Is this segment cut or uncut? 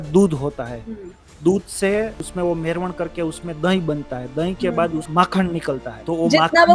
cut